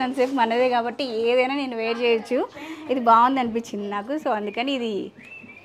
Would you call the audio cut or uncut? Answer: uncut